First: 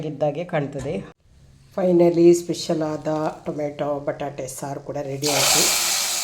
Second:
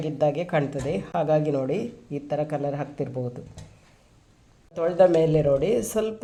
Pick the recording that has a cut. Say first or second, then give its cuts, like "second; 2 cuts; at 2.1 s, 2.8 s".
first; 1 cut; at 1.1 s